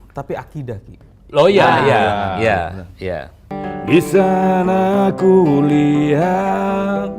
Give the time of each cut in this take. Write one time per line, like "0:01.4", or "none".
0:03.5